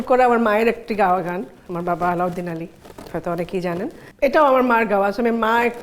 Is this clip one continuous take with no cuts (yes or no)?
yes